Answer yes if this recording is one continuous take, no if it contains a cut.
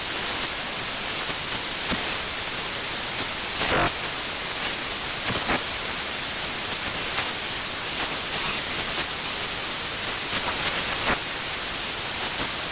yes